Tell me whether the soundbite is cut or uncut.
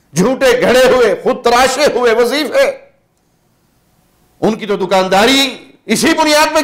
uncut